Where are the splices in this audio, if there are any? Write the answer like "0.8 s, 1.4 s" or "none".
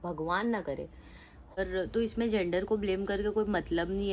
1.6 s

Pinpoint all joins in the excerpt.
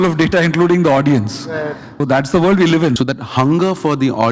2.0 s, 3.0 s

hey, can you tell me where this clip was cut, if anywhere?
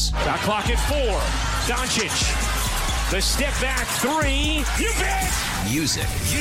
none

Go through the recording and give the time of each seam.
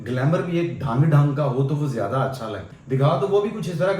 2.7 s

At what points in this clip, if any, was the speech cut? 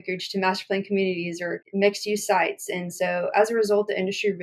1.6 s

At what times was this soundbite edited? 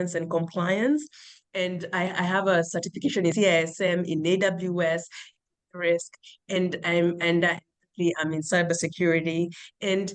none

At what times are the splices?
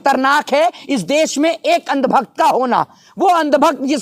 none

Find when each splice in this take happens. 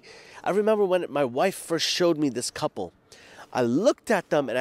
none

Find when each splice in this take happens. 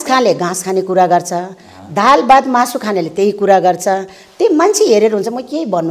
none

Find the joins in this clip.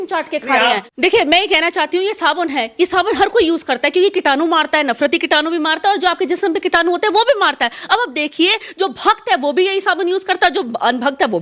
0.9 s

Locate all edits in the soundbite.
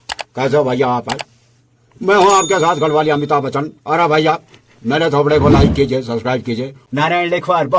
6.8 s

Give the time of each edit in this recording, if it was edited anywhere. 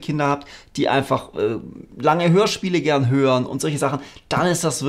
none

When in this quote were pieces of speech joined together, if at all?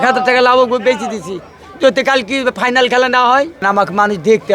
3.6 s

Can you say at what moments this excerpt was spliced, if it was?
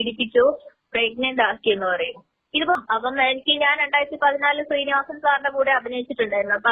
2.8 s

